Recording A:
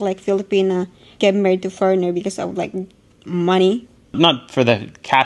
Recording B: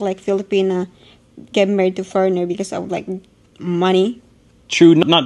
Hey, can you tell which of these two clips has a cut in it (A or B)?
A